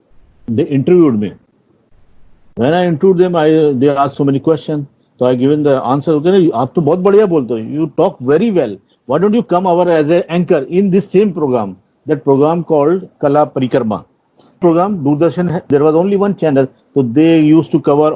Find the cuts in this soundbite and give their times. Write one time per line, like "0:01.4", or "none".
0:14.6
0:15.7